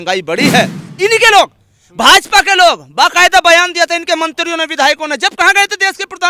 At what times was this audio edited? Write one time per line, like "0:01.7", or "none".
0:01.0